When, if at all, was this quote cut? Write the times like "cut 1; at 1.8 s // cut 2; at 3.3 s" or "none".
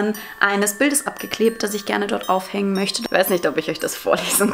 cut 1; at 3.0 s